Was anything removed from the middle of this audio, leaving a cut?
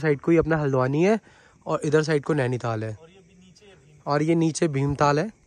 no; 0 cuts

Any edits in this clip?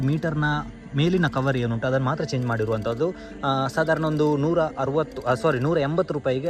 no; 0 cuts

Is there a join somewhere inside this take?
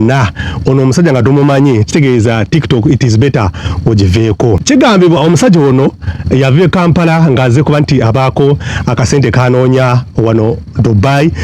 yes; 1 cut; at 4.6 s

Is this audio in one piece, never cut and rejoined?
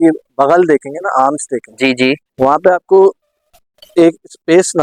yes; 0 cuts

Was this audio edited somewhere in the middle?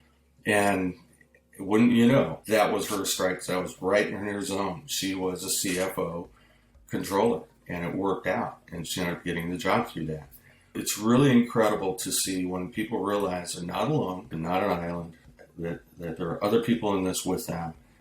yes; 2 cuts; at 10.8 s, 14.3 s

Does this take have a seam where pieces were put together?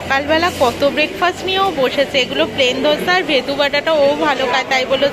no; 0 cuts

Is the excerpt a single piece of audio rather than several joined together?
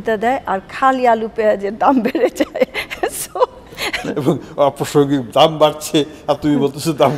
no; 1 cut; at 4.0 s

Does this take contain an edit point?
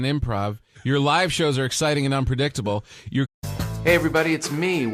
no; 0 cuts

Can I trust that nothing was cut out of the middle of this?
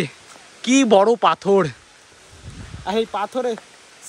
yes; 0 cuts

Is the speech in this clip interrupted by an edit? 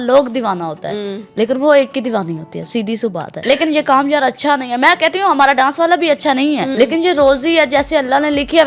yes; 2 cuts; at 3.3 s, 6.7 s

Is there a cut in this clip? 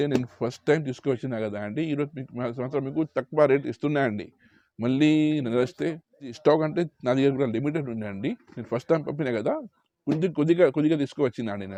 no; 0 cuts

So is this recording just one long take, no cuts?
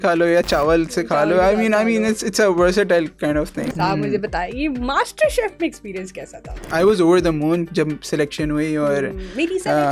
no; 2 cuts; at 3.7 s, 6.7 s

